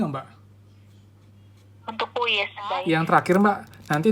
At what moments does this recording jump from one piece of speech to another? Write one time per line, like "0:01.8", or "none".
0:02.8

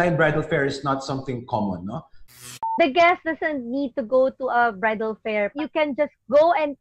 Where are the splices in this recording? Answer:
0:02.3
0:05.5

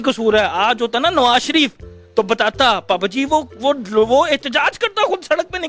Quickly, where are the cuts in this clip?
none

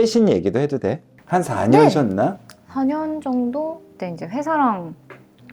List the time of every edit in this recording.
0:03.9

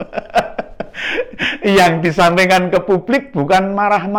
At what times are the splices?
none

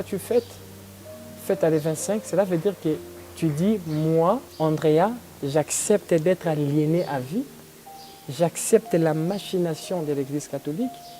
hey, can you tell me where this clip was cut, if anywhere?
0:04.5

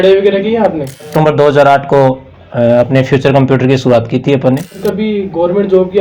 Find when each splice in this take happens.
0:01.1
0:04.8

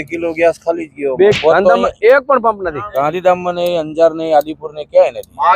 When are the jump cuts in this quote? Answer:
0:01.4

